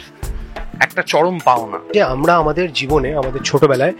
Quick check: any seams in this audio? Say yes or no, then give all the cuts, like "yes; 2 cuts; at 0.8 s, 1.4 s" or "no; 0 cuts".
yes; 1 cut; at 1.9 s